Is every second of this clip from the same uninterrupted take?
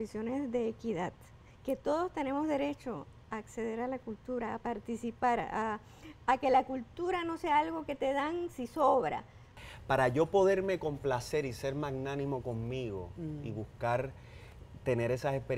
no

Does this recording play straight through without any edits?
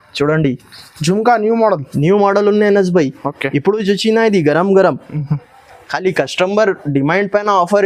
yes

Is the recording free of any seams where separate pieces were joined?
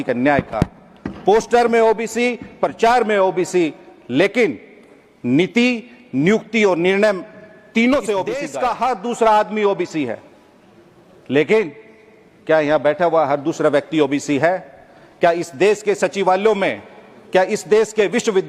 no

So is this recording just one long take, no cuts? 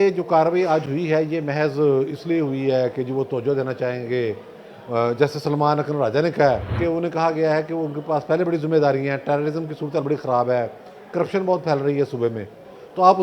no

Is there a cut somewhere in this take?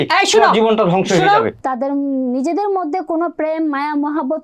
yes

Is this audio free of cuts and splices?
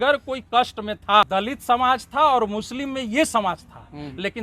no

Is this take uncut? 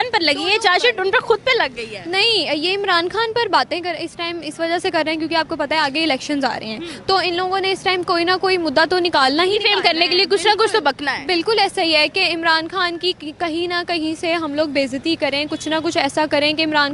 yes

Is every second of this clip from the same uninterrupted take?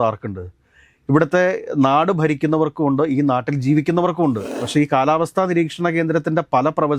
no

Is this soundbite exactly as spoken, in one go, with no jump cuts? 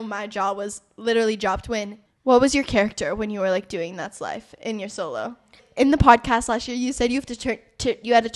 no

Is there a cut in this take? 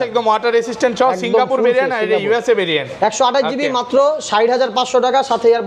no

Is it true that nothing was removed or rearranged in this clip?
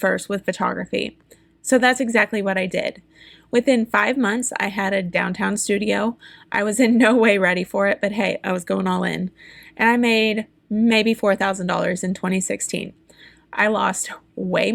yes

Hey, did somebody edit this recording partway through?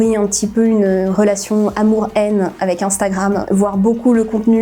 yes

